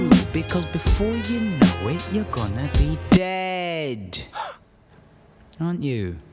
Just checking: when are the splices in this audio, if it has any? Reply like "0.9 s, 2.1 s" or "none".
4.7 s